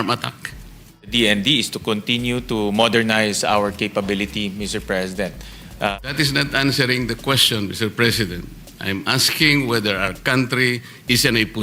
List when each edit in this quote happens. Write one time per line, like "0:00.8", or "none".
0:01.1
0:05.9